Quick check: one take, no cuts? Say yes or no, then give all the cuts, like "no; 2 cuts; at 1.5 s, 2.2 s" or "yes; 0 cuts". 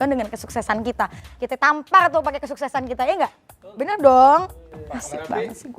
yes; 0 cuts